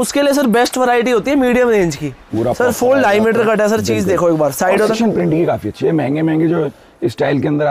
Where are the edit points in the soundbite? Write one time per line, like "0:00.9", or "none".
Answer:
0:02.3
0:04.9